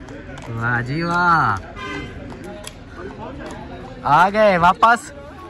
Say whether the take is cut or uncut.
uncut